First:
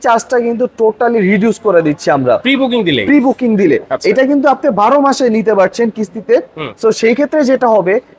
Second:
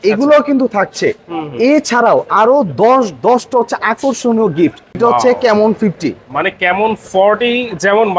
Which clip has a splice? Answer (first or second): second